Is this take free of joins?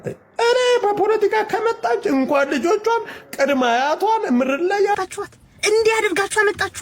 no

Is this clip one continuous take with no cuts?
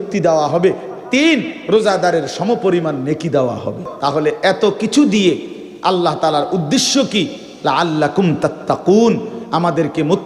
no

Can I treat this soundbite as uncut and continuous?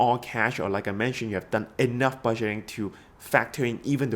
yes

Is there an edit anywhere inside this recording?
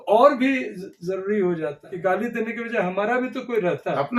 yes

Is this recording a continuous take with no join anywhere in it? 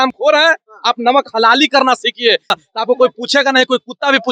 no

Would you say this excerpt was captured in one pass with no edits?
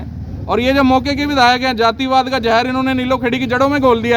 yes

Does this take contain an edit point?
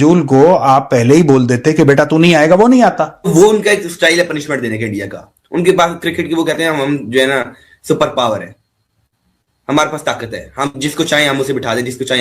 yes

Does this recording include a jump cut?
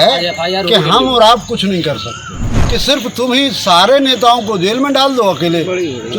yes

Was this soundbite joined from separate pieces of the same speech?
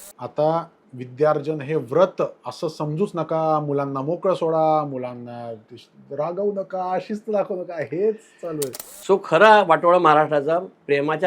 yes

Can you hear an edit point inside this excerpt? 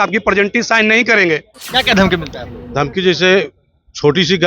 yes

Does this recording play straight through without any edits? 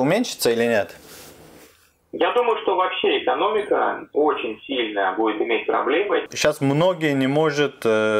no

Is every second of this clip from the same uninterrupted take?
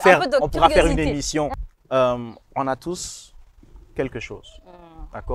no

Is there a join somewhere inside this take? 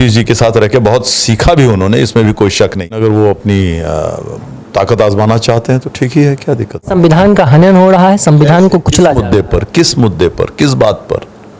yes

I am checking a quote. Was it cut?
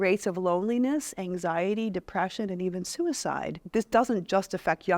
yes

